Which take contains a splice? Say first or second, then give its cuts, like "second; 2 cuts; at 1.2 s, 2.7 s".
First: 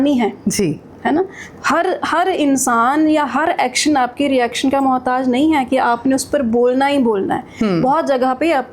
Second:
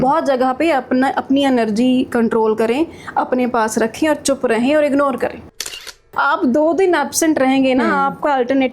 second; 1 cut; at 5.7 s